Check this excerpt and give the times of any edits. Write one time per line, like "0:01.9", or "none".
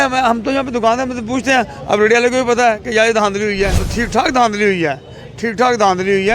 0:03.9